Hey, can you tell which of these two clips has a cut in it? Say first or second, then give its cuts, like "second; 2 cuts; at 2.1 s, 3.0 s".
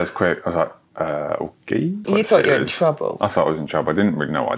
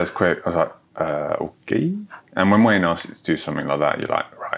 first; 1 cut; at 2.0 s